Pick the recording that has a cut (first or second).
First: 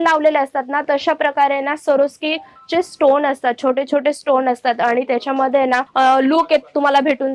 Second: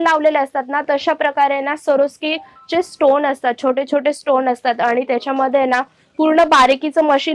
first